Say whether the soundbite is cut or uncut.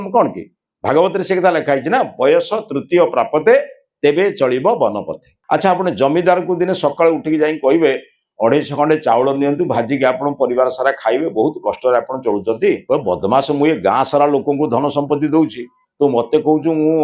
cut